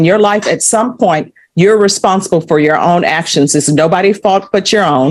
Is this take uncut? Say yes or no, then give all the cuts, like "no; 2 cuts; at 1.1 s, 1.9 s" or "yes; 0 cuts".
yes; 0 cuts